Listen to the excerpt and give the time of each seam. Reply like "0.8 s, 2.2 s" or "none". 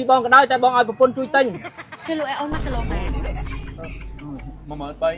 1.7 s